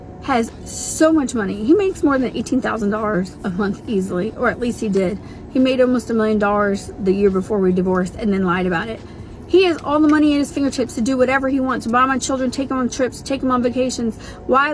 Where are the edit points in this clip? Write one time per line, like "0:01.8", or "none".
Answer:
none

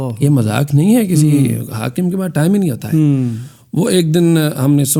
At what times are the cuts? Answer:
none

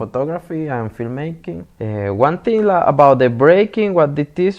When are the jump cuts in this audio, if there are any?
0:01.7

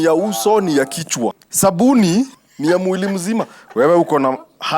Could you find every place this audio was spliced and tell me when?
0:01.4
0:02.4

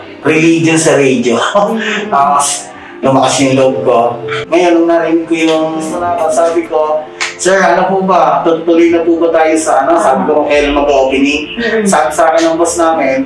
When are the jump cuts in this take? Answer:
0:04.3
0:06.0

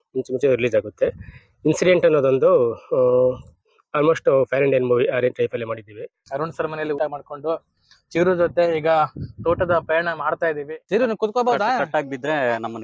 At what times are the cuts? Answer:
0:06.3
0:10.7

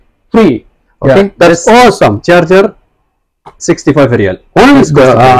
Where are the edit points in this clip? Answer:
none

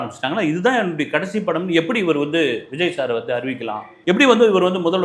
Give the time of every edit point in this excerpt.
0:03.9

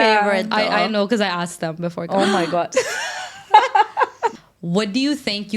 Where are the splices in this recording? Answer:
0:04.5

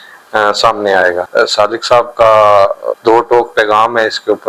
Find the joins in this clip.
0:01.3
0:02.9

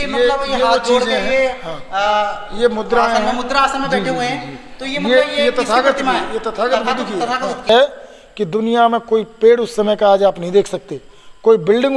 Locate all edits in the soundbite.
0:07.7

